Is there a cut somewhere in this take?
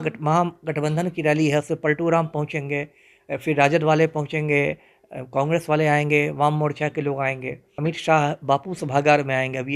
yes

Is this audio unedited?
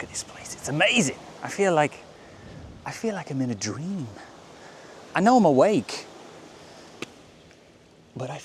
yes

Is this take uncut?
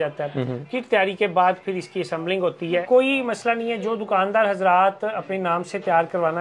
no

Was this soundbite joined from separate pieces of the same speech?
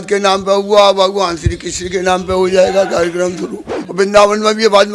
yes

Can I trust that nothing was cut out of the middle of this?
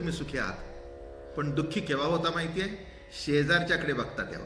yes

